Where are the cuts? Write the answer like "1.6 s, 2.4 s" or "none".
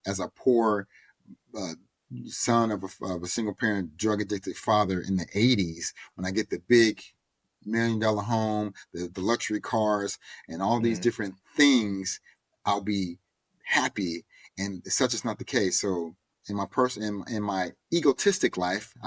none